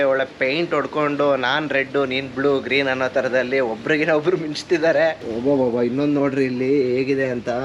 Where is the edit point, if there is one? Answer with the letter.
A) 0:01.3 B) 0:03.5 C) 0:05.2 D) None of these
C